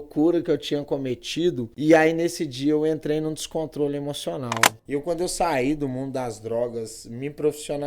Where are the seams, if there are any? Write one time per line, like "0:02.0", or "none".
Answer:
0:01.7
0:04.7